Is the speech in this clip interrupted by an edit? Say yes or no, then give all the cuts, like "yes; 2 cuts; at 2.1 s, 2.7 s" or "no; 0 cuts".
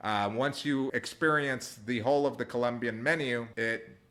no; 0 cuts